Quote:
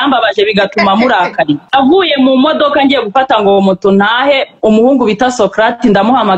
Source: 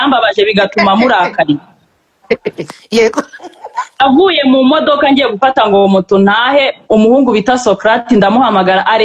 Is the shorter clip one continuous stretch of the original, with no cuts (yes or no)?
no